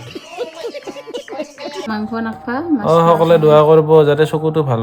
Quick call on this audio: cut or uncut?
cut